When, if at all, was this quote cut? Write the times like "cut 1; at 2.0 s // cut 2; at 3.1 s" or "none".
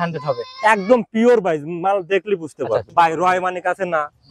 cut 1; at 2.9 s